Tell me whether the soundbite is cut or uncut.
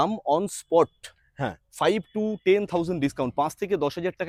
uncut